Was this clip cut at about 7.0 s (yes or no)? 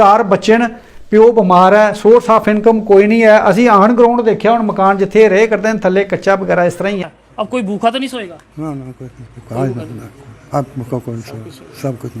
yes